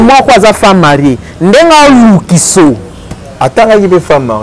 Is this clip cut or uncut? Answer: uncut